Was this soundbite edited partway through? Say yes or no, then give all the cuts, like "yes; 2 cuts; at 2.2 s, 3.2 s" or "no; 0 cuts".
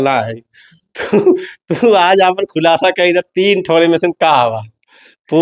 no; 0 cuts